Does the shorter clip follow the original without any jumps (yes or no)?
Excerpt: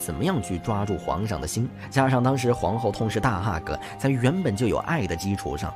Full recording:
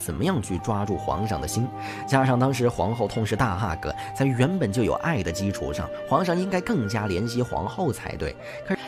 no